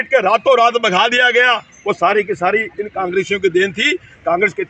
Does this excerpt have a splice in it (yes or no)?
no